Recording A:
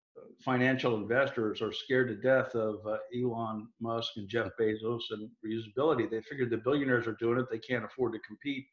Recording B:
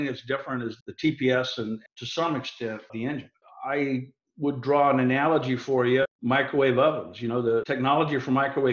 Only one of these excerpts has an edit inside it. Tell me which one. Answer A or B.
B